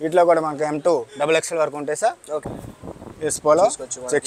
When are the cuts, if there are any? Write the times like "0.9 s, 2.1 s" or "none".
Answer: 2.5 s